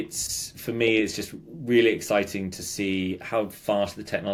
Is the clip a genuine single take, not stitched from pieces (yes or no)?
yes